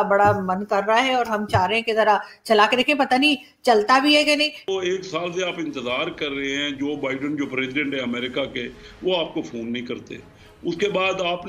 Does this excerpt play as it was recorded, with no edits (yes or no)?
no